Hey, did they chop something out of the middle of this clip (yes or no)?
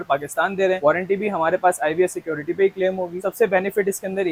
no